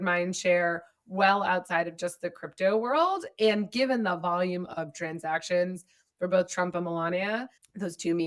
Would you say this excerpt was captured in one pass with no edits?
yes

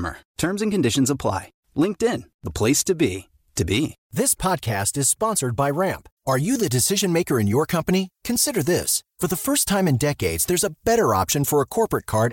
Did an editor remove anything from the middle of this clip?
yes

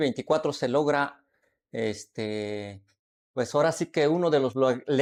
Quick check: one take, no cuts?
yes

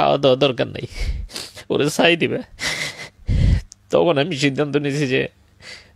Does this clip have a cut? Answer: no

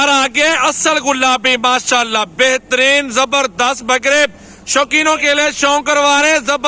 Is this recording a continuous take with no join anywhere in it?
yes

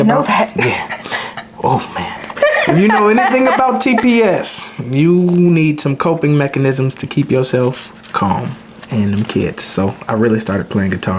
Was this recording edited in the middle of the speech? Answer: no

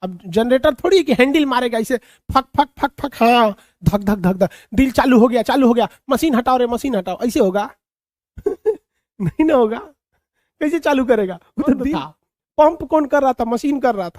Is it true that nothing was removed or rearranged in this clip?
no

